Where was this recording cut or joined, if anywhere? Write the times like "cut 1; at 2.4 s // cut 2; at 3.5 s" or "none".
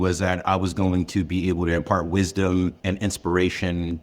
cut 1; at 2.8 s